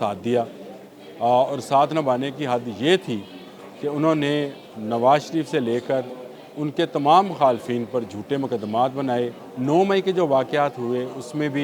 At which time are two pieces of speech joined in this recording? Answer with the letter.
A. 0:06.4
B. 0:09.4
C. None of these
B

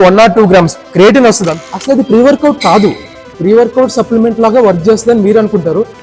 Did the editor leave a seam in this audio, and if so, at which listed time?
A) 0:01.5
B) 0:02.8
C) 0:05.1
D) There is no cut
A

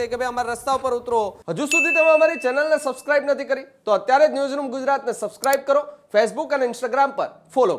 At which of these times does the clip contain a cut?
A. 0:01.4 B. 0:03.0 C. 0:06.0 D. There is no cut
A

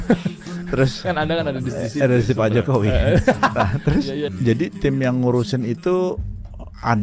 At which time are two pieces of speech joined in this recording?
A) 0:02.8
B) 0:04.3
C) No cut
B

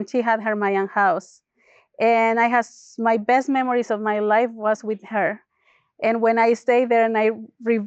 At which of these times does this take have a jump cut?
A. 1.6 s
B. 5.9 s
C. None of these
C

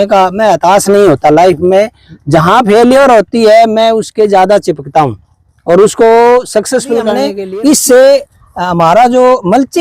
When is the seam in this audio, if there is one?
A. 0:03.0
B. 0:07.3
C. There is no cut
B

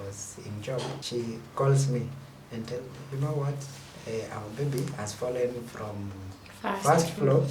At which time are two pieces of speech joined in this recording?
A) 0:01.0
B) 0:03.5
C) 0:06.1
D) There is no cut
A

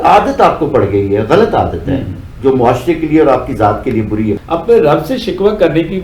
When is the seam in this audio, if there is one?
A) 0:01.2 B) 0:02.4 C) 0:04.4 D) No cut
C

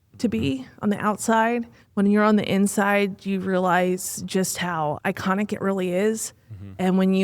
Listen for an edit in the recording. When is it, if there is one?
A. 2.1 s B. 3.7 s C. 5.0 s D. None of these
C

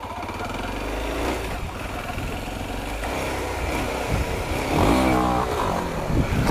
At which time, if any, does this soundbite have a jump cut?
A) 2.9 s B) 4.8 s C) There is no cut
C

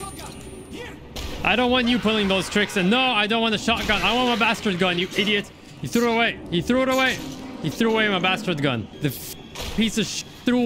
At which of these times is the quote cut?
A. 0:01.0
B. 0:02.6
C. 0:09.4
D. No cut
C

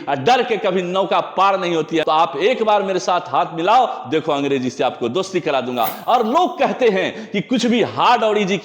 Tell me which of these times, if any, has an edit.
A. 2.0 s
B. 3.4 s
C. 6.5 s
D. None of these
A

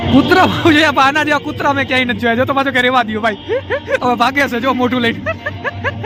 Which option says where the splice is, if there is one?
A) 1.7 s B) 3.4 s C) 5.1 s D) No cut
D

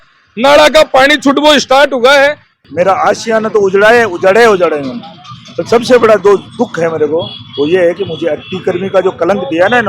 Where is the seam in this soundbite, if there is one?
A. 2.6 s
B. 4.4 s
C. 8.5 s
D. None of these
A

